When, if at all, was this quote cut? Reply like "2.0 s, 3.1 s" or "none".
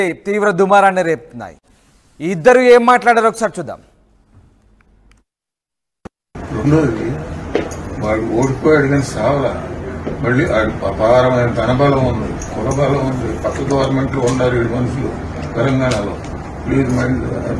none